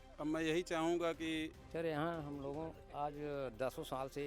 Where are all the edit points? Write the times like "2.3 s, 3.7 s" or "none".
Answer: 1.6 s